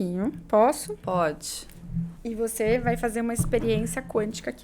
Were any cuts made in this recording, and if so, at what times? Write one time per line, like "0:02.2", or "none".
0:02.1